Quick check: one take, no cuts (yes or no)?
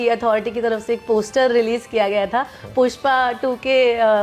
yes